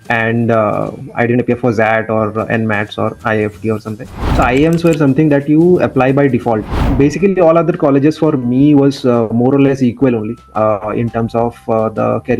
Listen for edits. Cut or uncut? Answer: cut